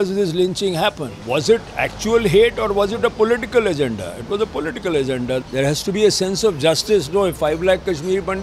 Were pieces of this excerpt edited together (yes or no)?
yes